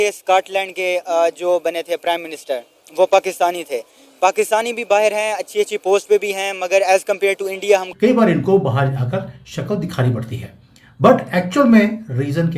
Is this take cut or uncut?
cut